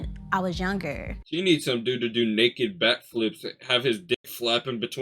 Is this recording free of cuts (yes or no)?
no